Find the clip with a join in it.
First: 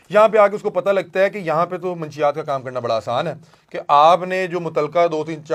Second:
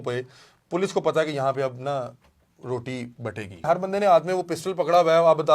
second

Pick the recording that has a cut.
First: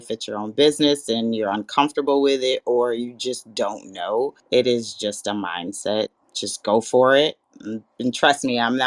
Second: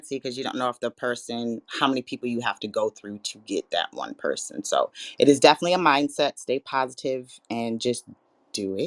first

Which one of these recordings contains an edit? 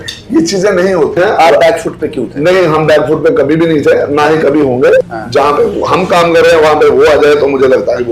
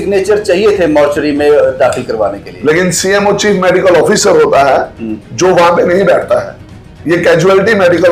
first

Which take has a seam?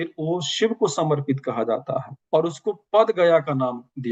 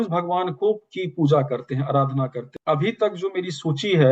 second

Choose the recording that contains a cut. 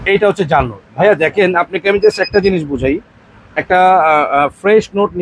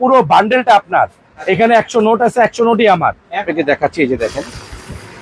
second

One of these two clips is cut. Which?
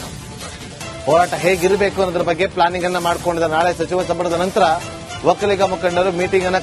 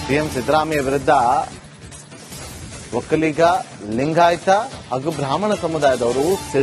first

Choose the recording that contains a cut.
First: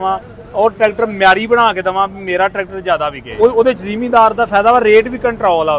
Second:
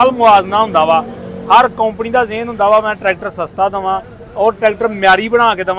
first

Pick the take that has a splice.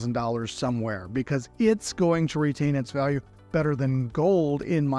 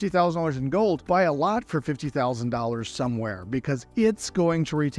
second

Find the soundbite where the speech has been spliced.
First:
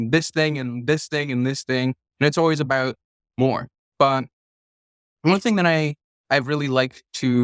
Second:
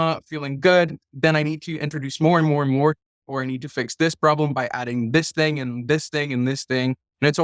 second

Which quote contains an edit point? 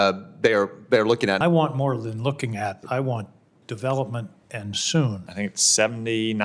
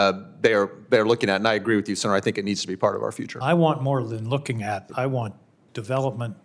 first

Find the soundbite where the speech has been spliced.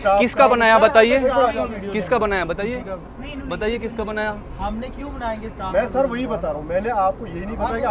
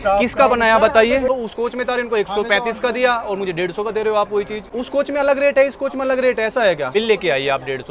second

